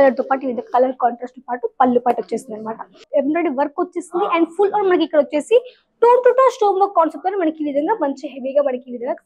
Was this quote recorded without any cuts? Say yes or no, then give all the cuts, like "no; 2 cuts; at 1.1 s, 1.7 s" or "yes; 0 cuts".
no; 1 cut; at 3.0 s